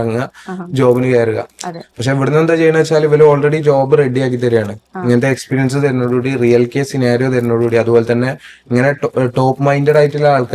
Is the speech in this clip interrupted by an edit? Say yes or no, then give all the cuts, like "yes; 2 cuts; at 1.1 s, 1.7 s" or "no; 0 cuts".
no; 0 cuts